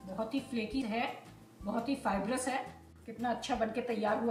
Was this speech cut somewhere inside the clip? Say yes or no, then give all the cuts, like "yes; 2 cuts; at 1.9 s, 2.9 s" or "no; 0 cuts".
no; 0 cuts